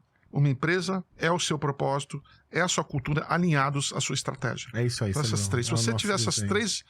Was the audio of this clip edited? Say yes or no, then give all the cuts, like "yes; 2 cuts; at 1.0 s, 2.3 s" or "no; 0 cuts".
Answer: yes; 1 cut; at 1.1 s